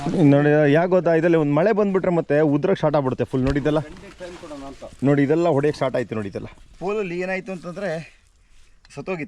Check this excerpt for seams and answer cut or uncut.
cut